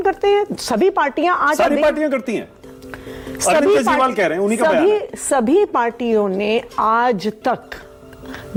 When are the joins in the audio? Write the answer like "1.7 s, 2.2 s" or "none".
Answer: none